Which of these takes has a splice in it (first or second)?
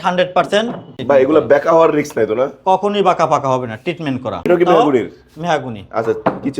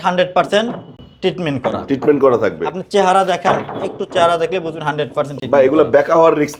first